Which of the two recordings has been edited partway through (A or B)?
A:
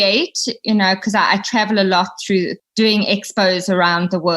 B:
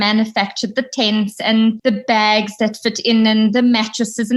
B